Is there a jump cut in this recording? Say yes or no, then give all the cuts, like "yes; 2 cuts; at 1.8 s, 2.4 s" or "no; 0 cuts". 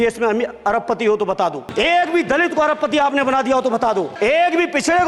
yes; 2 cuts; at 1.6 s, 4.1 s